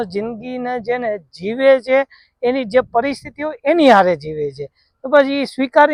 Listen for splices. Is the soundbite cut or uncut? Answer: uncut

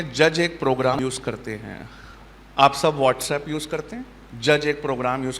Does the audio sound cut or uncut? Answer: cut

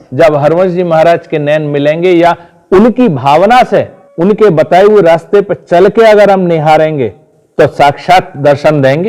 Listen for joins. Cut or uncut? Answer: cut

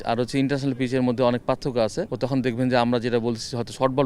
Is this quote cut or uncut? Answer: cut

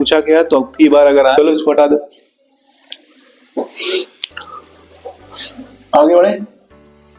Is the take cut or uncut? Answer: cut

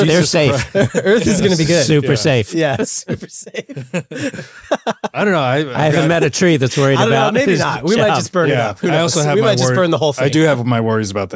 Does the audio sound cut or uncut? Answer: uncut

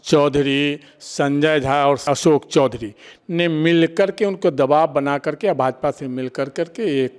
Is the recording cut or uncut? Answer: cut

